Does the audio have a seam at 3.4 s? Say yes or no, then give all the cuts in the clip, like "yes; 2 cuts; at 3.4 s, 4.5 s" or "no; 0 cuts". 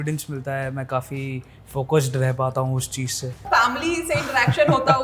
yes; 1 cut; at 3.4 s